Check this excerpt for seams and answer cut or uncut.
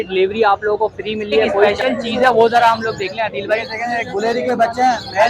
cut